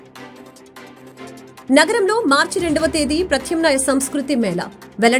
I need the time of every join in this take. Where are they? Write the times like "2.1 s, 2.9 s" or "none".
1.0 s